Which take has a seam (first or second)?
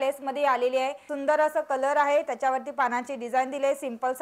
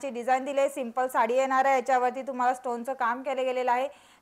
first